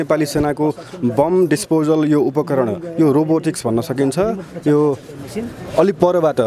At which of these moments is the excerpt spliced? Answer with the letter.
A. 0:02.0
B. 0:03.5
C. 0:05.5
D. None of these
D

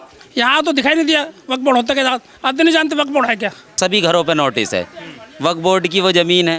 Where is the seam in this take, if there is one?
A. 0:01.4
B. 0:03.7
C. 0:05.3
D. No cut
B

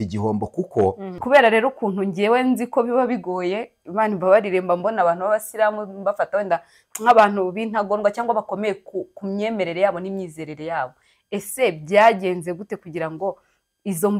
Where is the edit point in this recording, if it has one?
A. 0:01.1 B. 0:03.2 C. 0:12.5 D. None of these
A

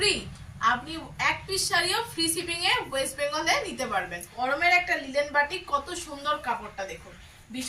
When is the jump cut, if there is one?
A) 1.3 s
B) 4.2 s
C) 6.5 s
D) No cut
B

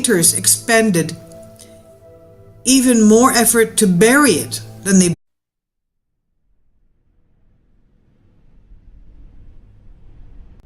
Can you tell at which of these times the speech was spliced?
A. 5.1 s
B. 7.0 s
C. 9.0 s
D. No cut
D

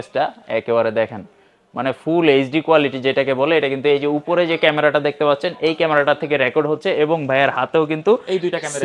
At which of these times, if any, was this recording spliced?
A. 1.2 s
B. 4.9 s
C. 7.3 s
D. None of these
D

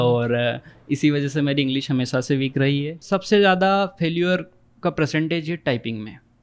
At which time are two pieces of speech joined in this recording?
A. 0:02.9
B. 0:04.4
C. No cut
A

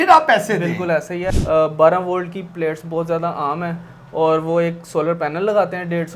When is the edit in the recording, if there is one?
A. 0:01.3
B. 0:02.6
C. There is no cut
A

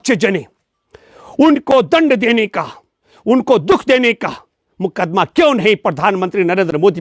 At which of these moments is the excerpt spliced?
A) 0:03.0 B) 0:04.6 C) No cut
C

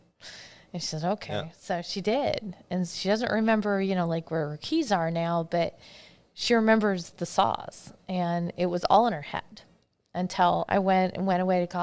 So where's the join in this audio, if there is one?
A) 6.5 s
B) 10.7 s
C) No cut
B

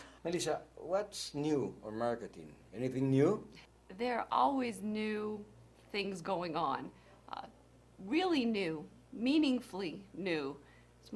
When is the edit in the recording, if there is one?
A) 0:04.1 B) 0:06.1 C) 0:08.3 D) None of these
C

